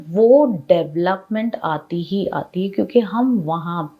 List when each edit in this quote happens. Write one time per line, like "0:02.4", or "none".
none